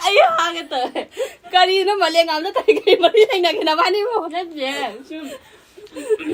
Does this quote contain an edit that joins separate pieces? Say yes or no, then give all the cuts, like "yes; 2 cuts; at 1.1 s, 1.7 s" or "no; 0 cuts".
no; 0 cuts